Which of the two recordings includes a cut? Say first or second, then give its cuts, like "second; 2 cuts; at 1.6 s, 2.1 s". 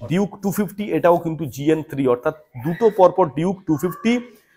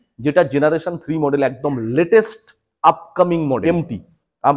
second; 1 cut; at 3.6 s